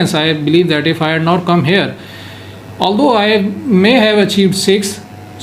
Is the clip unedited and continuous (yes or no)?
yes